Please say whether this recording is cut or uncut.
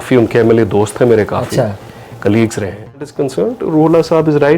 cut